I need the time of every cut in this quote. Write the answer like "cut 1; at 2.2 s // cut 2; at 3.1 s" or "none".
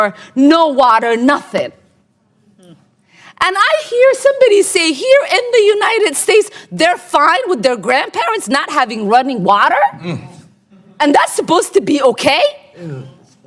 none